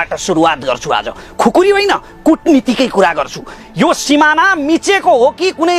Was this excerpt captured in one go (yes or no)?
no